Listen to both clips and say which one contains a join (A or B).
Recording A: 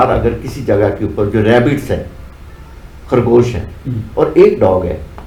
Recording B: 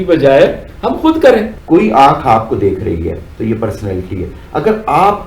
B